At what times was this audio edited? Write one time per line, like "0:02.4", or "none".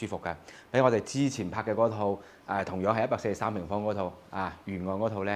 none